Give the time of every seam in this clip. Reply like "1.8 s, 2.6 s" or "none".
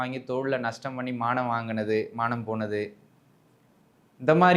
none